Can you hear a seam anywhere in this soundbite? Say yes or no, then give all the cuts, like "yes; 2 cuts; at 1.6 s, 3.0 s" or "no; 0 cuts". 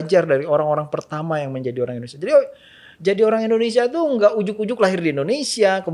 no; 0 cuts